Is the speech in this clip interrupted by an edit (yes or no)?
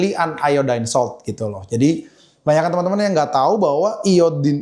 no